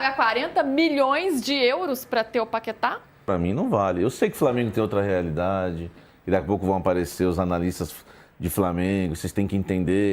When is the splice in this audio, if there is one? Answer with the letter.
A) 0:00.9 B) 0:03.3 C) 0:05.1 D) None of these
B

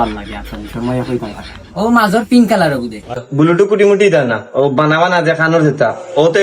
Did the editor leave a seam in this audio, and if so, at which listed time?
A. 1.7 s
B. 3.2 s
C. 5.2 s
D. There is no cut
B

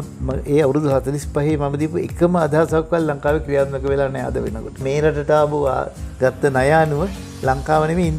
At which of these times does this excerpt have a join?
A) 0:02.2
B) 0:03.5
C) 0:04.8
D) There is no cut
C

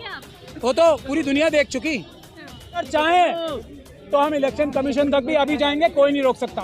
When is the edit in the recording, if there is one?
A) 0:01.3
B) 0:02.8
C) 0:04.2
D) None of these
B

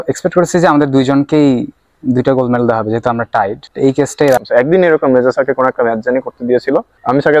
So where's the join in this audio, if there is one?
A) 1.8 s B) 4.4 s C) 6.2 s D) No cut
B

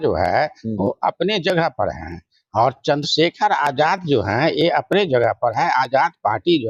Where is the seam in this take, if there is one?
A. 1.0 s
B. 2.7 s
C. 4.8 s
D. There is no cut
D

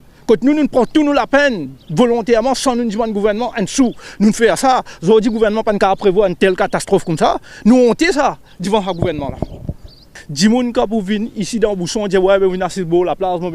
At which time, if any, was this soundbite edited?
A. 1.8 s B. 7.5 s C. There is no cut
C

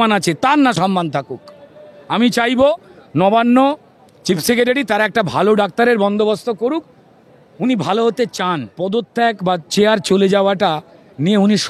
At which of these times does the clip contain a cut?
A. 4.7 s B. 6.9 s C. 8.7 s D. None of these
C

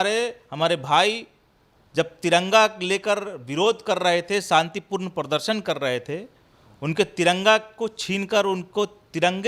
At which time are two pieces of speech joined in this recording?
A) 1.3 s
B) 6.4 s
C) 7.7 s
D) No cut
D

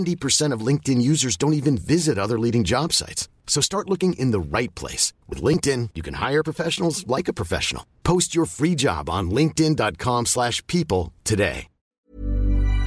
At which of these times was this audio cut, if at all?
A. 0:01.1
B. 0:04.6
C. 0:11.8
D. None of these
C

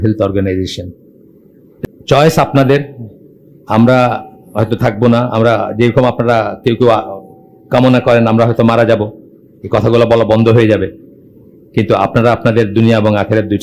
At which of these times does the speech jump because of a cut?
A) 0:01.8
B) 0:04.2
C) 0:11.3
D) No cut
A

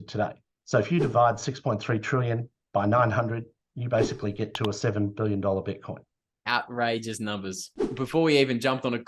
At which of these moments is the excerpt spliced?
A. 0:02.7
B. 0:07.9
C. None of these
B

